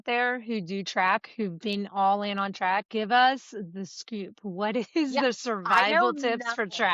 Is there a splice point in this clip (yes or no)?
no